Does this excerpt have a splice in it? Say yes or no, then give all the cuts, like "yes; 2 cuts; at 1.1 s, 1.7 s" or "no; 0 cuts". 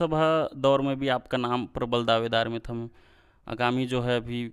no; 0 cuts